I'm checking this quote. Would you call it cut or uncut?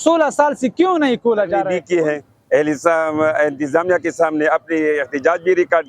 cut